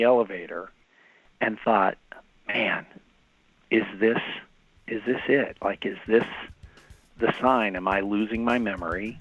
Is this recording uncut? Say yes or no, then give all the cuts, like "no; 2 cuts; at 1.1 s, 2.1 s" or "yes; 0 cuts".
yes; 0 cuts